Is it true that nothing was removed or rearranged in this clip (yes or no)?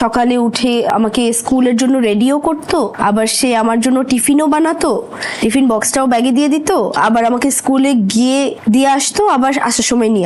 no